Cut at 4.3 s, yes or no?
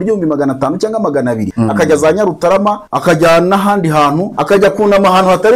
yes